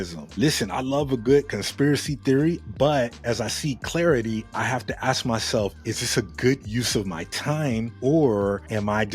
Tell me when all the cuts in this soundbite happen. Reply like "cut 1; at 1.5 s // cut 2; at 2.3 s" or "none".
cut 1; at 3.2 s // cut 2; at 7.9 s